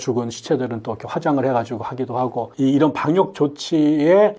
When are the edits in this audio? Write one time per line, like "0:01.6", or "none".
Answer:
0:02.5